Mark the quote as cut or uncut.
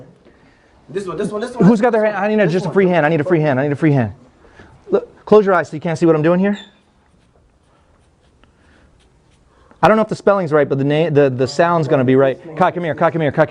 uncut